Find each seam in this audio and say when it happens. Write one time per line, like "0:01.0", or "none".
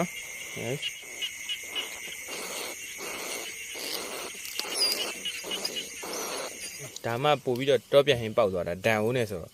0:01.0
0:06.9